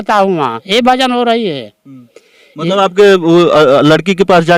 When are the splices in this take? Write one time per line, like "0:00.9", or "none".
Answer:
none